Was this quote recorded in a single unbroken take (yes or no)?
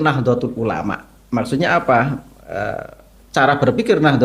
yes